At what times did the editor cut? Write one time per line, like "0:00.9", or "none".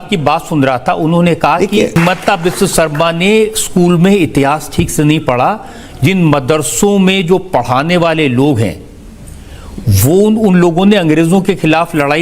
0:02.0